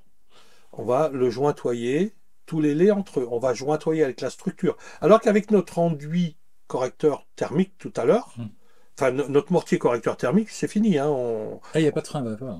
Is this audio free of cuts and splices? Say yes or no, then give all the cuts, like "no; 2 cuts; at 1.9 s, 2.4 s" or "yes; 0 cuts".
yes; 0 cuts